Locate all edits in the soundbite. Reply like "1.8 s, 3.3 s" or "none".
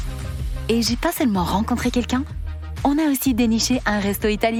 none